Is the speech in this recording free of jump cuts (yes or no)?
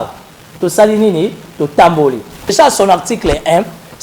no